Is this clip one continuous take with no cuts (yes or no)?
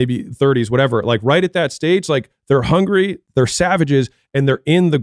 no